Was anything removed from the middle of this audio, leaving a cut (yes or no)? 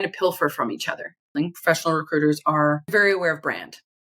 yes